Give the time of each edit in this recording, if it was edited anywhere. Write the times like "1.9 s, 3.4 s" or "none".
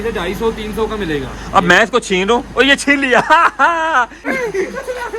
4.3 s